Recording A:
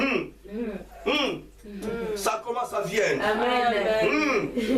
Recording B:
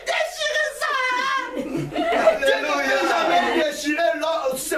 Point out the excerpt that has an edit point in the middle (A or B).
B